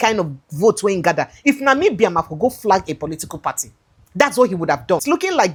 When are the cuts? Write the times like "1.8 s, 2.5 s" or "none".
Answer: none